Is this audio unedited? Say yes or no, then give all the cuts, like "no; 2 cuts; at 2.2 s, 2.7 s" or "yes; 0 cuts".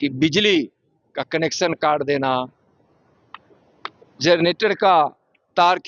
yes; 0 cuts